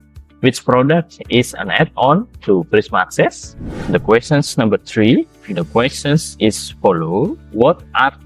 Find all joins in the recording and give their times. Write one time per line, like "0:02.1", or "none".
0:03.7
0:07.4